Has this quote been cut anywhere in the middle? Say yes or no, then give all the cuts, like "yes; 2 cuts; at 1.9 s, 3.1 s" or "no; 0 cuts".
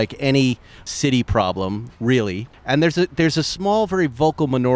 yes; 1 cut; at 2.4 s